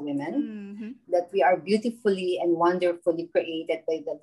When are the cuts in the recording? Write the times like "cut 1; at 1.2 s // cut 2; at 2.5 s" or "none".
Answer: cut 1; at 0.9 s